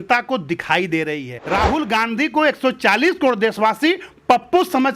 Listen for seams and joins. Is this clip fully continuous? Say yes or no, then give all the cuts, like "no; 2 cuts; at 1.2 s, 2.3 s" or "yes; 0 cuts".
no; 1 cut; at 1.3 s